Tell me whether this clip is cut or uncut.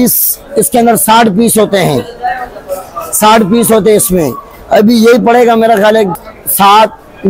uncut